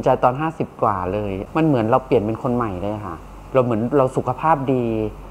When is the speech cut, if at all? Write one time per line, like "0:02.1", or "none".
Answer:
0:01.4